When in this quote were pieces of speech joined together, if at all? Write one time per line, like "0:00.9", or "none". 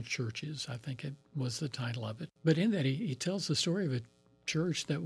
0:02.3